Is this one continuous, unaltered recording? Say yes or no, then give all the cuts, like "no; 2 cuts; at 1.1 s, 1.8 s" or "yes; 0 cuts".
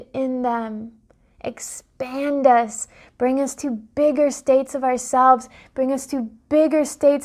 yes; 0 cuts